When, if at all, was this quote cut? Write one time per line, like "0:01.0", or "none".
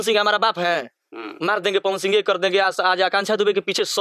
none